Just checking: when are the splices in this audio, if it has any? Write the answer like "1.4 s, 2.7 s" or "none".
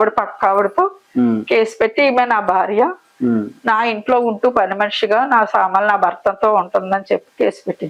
none